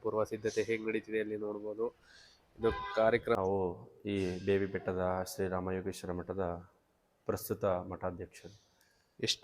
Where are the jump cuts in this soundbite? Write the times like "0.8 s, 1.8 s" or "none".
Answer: 3.4 s